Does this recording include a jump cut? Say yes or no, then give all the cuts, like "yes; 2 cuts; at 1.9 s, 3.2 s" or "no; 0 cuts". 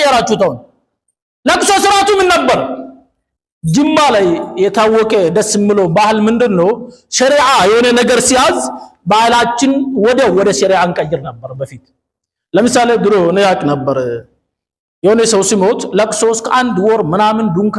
no; 0 cuts